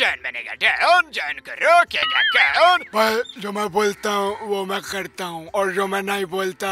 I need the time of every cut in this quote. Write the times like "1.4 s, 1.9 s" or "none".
2.9 s